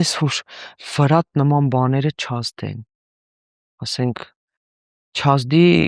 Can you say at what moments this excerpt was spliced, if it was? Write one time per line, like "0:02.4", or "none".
none